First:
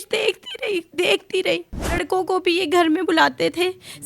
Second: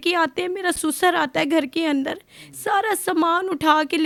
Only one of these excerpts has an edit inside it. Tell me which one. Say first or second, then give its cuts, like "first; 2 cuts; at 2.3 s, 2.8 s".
first; 1 cut; at 2.0 s